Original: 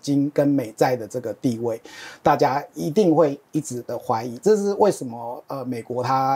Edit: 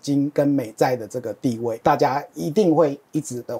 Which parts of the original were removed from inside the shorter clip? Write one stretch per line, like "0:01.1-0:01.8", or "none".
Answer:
0:01.8-0:02.2